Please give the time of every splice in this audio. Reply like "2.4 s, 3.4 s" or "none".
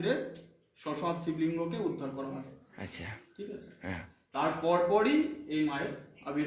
none